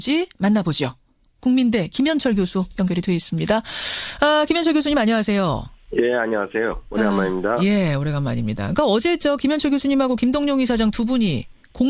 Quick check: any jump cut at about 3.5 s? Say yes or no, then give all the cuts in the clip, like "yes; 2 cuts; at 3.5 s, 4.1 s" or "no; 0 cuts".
no; 1 cut; at 9.4 s